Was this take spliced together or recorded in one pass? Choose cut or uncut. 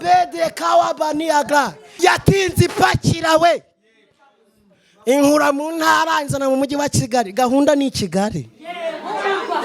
cut